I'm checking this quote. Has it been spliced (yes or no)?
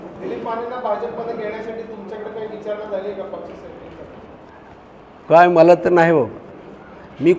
no